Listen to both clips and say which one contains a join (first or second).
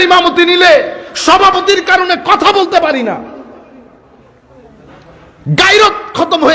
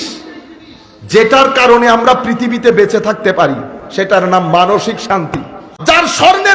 second